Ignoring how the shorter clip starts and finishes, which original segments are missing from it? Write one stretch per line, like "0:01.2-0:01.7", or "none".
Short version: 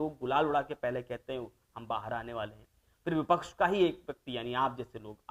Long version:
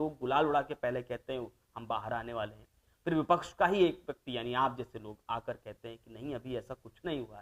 none